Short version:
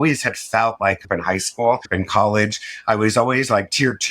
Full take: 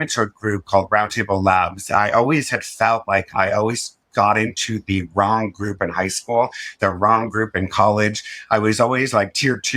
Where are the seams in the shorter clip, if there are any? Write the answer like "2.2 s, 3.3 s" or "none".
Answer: 1.0 s, 1.9 s